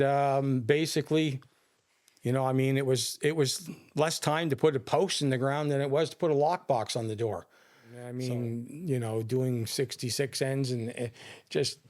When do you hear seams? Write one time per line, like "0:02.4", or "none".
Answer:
0:08.1